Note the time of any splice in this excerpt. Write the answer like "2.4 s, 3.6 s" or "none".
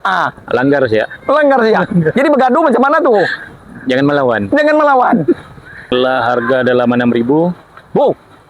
5.9 s